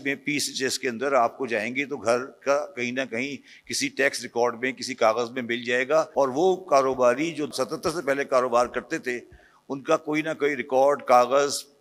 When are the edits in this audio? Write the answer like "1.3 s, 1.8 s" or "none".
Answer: 6.1 s, 7.5 s